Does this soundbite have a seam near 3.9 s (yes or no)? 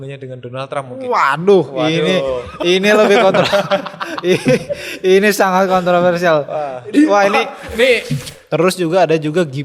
no